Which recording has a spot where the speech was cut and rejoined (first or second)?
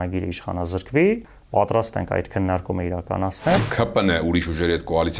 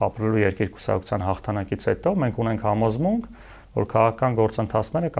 first